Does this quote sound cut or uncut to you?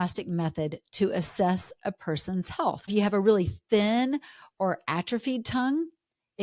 cut